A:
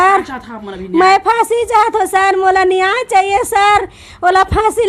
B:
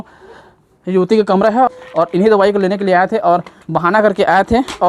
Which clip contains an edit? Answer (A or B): B